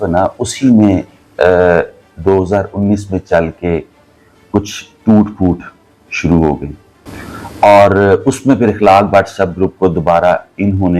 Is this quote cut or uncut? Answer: uncut